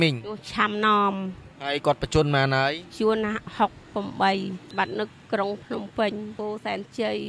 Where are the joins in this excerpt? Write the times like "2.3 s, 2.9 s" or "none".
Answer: 4.7 s, 6.3 s